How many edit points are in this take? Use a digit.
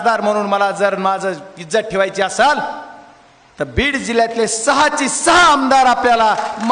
0